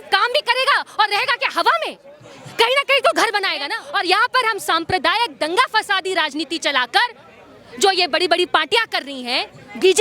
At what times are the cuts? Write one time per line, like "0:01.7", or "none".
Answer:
0:03.8